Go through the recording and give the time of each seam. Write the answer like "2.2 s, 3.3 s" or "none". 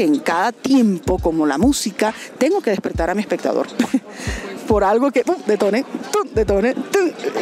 none